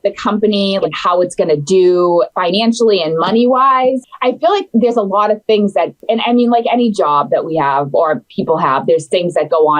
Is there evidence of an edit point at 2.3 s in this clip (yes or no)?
yes